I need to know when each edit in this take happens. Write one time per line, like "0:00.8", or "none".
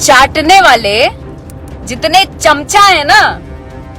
none